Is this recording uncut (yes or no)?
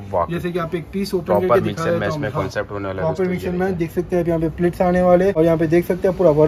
no